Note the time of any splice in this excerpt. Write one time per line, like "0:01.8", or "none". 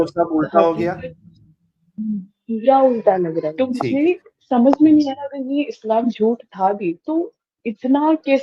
0:03.5